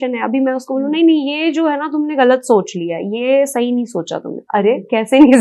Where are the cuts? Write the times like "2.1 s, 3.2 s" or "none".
none